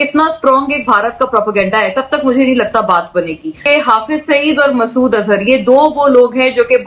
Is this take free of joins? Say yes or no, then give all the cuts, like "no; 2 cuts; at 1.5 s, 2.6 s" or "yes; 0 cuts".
no; 1 cut; at 3.7 s